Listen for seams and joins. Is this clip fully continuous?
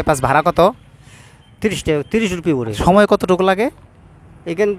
no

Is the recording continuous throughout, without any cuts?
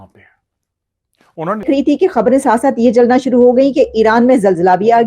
no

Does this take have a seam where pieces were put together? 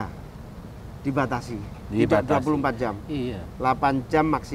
no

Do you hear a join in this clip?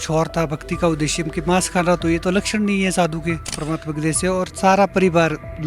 yes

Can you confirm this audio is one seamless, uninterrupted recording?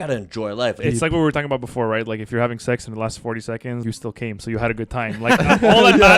no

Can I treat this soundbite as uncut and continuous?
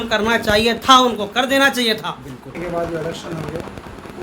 no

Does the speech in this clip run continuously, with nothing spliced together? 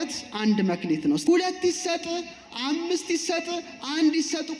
no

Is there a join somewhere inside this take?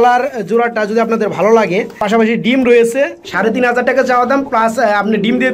yes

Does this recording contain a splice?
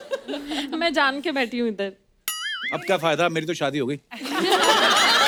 no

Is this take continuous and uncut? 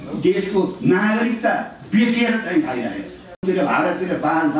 no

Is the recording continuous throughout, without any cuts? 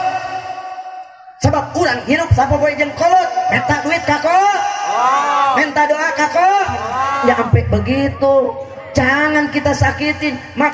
no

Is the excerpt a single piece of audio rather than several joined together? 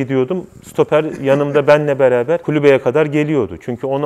yes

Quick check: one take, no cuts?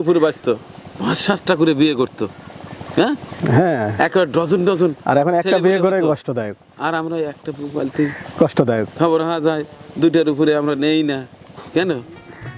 yes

